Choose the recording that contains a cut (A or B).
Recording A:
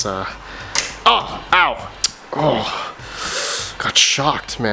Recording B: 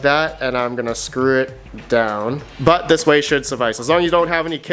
B